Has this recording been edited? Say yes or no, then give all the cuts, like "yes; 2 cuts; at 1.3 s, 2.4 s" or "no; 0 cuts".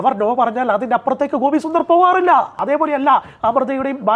yes; 1 cut; at 2.6 s